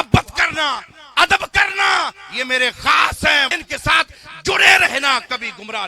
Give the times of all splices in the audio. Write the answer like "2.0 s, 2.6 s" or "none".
3.5 s